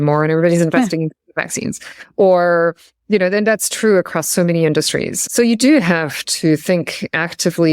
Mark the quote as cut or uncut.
cut